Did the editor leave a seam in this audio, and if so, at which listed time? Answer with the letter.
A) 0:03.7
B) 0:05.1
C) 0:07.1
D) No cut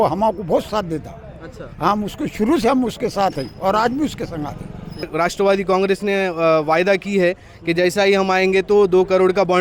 B